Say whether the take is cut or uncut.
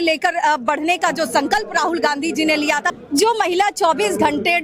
cut